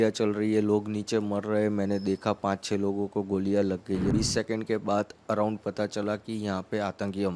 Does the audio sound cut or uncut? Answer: cut